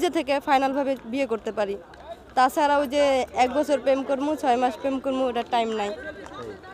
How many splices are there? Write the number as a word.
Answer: zero